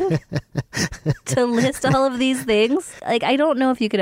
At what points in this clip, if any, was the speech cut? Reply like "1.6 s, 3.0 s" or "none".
2.9 s